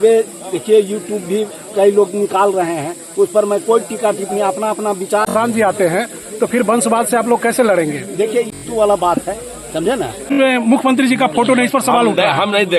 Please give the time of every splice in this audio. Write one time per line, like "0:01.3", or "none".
0:05.3
0:08.6
0:10.3